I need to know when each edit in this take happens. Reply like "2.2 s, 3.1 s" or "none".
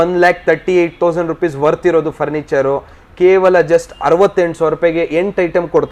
none